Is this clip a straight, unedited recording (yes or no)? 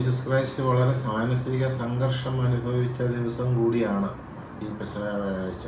no